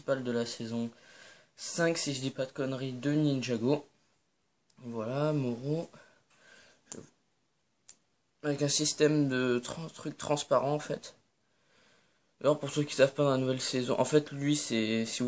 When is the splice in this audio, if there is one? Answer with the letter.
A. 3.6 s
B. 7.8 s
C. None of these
B